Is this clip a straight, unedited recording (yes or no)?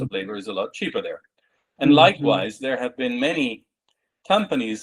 yes